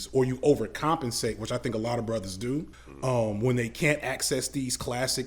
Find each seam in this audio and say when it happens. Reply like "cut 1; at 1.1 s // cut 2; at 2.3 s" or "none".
cut 1; at 2.8 s